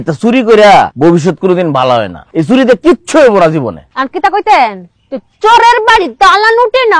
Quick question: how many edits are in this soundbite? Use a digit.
3